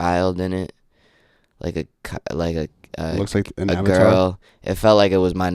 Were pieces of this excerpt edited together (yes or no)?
no